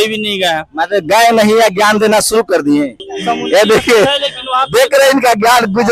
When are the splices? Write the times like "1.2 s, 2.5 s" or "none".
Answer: 3.0 s